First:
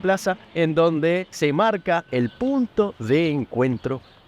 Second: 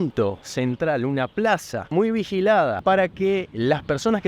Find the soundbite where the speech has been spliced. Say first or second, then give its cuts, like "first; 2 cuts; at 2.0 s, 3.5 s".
second; 2 cuts; at 1.9 s, 2.8 s